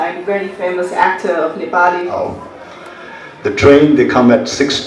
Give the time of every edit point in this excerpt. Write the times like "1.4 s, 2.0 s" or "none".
2.2 s